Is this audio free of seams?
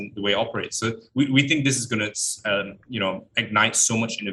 yes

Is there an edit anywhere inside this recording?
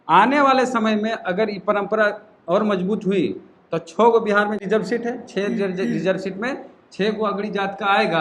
yes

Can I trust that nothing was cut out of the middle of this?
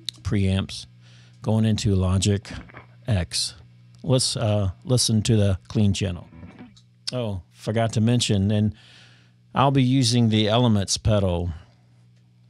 no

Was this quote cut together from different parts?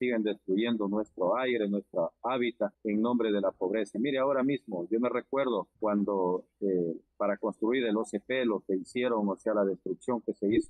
no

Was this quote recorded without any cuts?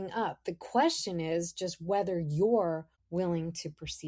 no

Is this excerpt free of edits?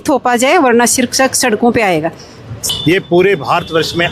no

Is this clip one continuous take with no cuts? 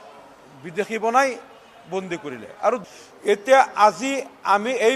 no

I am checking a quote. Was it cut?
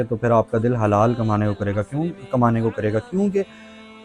no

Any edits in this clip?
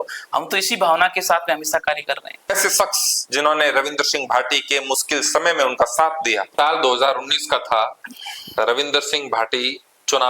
yes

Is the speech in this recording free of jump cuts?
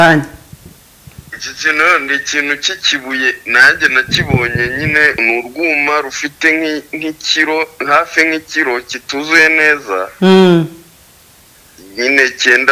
no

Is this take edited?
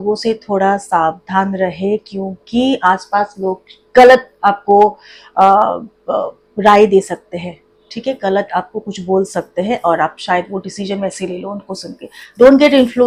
no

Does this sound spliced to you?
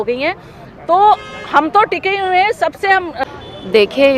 yes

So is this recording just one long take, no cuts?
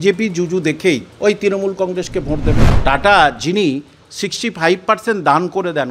no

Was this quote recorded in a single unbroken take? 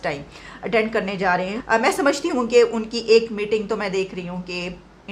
no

